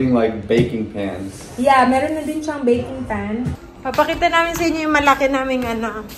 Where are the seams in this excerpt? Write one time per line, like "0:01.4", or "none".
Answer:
0:03.7

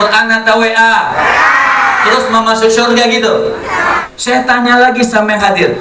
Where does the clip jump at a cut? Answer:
0:04.0

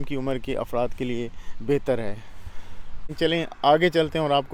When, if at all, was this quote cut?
0:03.1

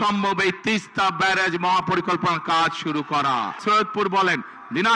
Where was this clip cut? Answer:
0:03.6

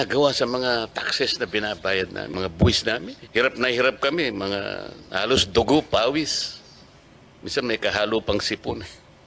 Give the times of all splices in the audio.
0:02.3
0:03.2

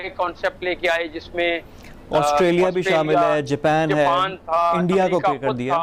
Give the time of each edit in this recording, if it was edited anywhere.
none

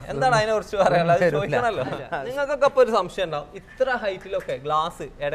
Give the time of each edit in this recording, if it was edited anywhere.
0:02.0

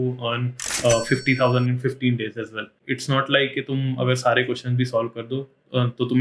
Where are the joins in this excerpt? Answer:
0:02.9

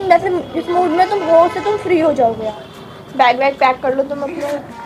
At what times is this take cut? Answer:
0:02.4

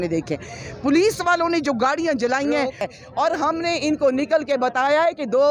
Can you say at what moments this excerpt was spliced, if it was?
0:02.9

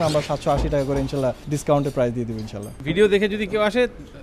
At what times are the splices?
0:01.5
0:02.8

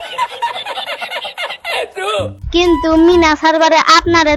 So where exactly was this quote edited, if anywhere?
none

